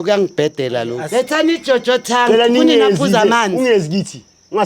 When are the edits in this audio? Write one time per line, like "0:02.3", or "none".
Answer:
0:01.0